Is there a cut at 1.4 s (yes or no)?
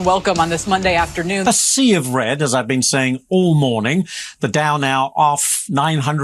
yes